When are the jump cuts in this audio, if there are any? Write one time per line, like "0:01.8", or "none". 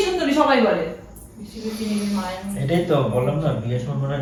none